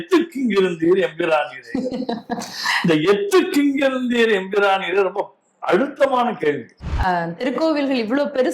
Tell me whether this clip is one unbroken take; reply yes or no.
no